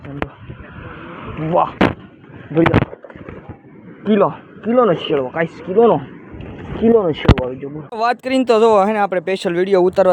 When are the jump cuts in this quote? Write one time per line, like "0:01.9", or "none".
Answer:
0:07.9